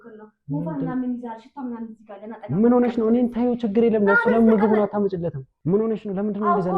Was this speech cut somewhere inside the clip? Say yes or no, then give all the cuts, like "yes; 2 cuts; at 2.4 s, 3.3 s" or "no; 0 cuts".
yes; 1 cut; at 5.5 s